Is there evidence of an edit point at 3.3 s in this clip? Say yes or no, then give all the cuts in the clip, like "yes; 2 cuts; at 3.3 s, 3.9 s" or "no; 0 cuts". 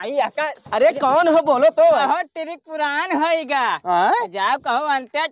no; 1 cut; at 2.0 s